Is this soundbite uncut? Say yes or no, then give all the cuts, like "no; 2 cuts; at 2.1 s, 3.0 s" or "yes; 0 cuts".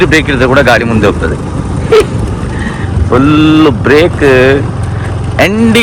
yes; 0 cuts